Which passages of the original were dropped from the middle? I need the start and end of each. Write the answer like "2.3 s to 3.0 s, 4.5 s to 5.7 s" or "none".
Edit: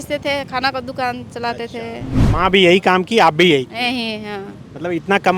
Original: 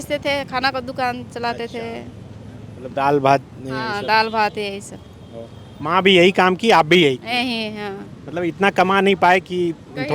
2.1 s to 5.6 s